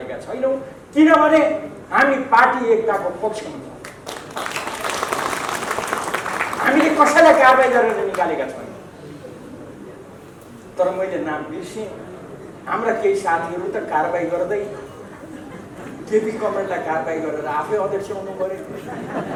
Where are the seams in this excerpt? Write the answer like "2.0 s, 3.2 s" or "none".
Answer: none